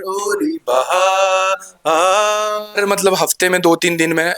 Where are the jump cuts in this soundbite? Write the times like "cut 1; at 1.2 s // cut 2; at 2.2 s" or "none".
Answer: cut 1; at 2.8 s